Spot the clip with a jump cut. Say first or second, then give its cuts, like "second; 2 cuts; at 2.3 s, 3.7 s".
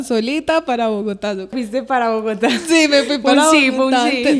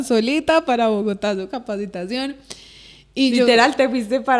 first; 1 cut; at 1.5 s